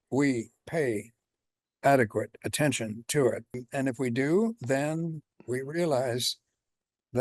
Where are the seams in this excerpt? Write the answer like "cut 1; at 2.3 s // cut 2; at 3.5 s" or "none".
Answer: cut 1; at 3.6 s